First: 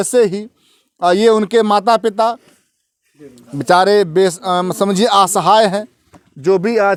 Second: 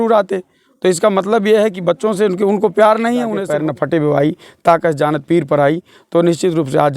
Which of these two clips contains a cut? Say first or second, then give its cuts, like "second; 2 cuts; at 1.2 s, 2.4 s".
second; 1 cut; at 3.4 s